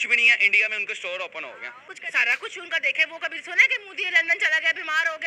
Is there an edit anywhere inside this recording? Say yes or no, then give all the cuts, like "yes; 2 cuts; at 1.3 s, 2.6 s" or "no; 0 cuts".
yes; 1 cut; at 1.9 s